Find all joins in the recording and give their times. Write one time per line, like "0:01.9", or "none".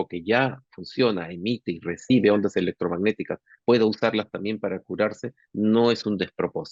none